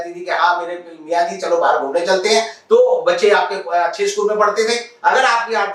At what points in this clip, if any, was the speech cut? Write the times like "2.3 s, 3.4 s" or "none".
none